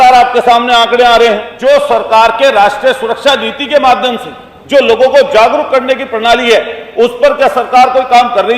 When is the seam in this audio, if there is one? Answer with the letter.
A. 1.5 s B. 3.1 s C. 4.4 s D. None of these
A